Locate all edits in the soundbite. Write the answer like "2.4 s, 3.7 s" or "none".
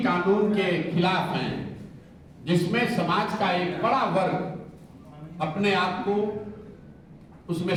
none